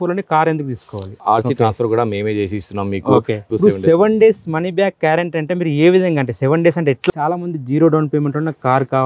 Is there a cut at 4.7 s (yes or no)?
no